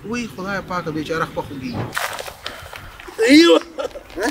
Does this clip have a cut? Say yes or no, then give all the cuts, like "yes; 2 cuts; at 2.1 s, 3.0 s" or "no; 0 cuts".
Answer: yes; 1 cut; at 1.9 s